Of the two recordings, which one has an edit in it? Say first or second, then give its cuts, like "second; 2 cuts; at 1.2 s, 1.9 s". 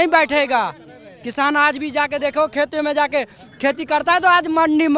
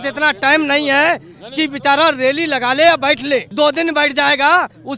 second; 1 cut; at 3.5 s